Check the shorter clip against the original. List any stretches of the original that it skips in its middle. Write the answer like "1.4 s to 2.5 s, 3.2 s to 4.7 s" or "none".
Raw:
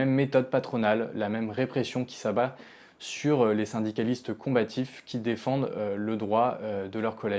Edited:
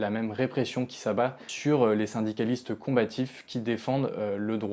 2.7 s to 3.1 s